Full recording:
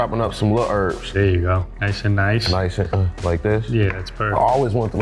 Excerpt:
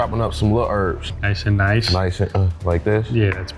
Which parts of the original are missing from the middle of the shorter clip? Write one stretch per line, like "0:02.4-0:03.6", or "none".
0:01.1-0:01.7